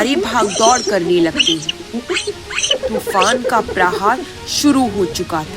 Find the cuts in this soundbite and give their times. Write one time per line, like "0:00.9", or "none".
none